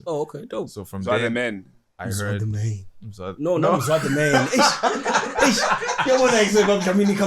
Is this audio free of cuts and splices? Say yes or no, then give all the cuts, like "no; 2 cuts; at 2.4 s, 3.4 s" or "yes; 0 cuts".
yes; 0 cuts